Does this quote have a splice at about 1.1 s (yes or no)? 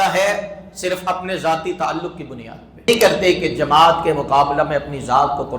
no